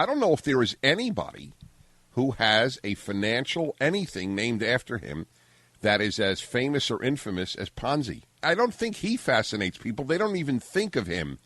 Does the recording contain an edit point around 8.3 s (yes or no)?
yes